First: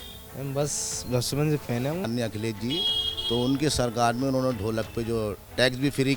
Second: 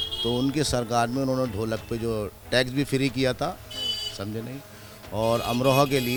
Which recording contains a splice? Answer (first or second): first